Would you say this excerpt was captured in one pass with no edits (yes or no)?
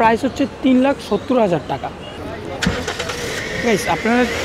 no